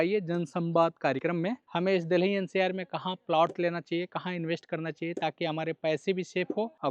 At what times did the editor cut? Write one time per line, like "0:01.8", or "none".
none